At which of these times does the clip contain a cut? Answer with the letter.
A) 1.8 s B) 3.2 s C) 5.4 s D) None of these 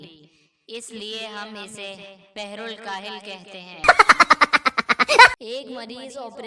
C